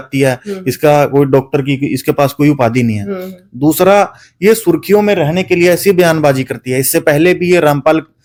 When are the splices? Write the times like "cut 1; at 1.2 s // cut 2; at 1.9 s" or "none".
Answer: none